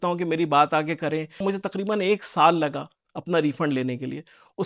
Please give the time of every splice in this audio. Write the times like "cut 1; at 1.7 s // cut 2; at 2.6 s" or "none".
cut 1; at 1.4 s